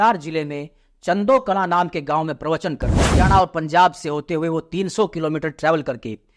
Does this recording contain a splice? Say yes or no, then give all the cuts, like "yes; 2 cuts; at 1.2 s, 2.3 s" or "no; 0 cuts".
yes; 1 cut; at 3.0 s